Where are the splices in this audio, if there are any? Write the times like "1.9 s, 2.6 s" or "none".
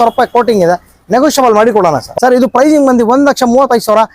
2.1 s